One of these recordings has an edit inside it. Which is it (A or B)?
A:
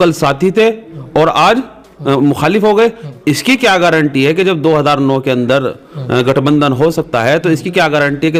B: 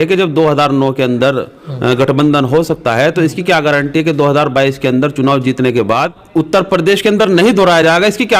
B